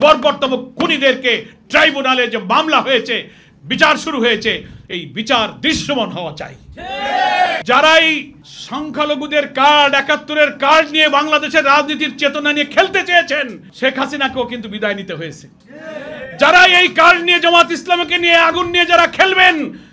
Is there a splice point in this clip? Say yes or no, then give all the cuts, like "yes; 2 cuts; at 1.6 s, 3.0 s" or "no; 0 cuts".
yes; 1 cut; at 7.6 s